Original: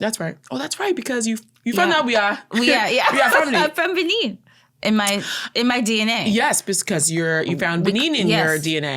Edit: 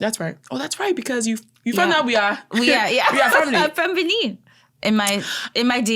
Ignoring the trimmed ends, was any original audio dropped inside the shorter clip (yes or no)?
no